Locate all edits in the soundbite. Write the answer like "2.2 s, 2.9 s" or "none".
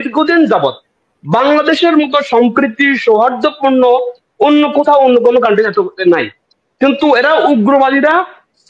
none